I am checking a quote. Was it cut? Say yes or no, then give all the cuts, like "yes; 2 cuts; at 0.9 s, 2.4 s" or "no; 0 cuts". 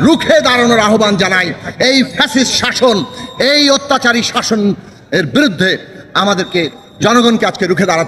no; 0 cuts